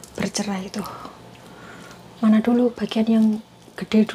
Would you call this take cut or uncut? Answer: uncut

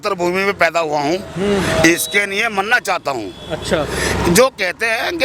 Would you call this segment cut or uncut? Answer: uncut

